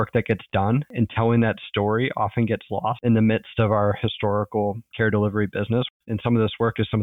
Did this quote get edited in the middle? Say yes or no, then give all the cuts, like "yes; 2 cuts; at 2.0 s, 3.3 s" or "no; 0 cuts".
yes; 3 cuts; at 0.9 s, 3.0 s, 5.9 s